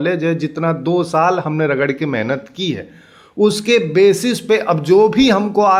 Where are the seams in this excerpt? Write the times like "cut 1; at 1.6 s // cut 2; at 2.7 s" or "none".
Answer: none